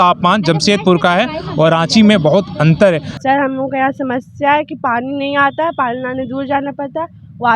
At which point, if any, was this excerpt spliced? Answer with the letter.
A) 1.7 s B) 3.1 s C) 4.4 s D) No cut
B